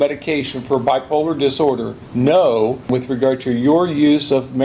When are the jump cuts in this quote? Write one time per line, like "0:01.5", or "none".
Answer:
0:02.0
0:02.9